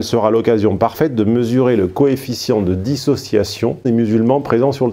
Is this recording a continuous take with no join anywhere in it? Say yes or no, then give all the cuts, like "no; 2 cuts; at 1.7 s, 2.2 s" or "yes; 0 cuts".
no; 1 cut; at 3.9 s